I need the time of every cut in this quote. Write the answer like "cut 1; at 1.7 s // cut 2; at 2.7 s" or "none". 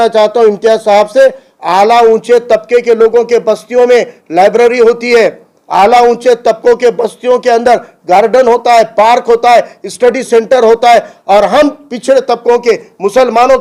none